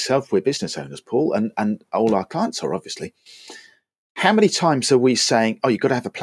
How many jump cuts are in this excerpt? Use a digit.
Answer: 0